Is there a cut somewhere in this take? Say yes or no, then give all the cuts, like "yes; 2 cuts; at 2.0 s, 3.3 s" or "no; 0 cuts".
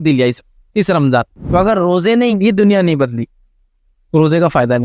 yes; 2 cuts; at 1.4 s, 2.3 s